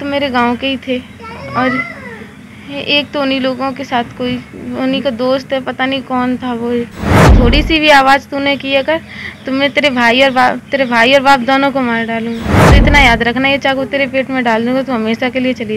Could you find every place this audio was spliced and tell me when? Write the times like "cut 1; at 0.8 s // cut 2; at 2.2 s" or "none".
cut 1; at 7.3 s // cut 2; at 12.6 s